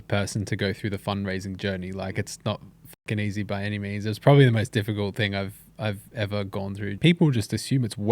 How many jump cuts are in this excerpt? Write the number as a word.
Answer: one